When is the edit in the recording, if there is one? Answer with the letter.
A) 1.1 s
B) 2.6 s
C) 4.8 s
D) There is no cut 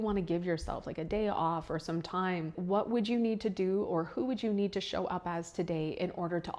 B